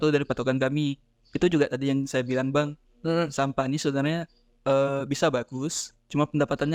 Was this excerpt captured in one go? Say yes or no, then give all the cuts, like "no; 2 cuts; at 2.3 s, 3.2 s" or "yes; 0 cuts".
yes; 0 cuts